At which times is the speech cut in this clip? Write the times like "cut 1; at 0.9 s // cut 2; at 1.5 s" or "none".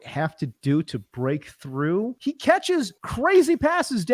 cut 1; at 2.1 s // cut 2; at 3.0 s